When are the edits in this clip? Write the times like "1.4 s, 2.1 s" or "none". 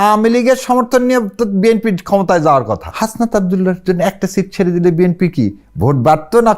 2.9 s